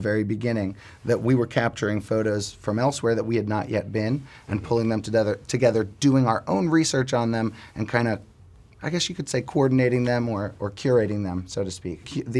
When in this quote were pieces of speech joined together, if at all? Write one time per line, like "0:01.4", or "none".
none